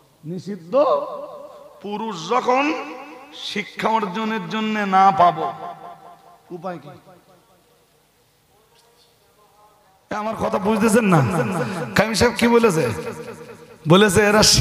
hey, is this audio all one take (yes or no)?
no